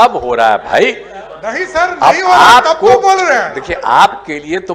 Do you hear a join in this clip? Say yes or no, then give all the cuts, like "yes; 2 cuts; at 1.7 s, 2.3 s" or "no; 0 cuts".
no; 0 cuts